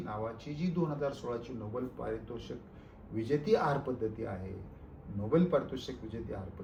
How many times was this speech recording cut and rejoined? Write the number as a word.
zero